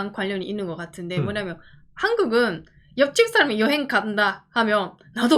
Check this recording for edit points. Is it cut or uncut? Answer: uncut